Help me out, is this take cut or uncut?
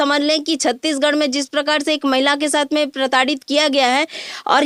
uncut